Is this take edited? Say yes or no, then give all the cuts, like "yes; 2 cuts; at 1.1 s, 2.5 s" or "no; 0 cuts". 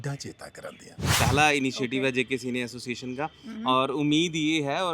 yes; 1 cut; at 1.1 s